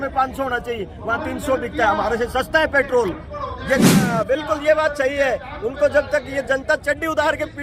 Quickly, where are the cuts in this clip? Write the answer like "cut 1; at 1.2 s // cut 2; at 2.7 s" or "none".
cut 1; at 4.0 s